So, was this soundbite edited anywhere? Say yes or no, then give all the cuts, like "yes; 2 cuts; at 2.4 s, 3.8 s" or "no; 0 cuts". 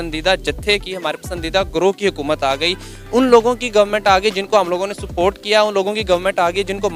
no; 0 cuts